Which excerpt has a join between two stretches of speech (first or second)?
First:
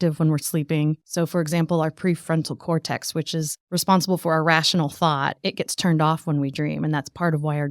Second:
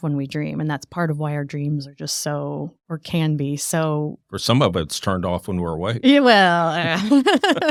first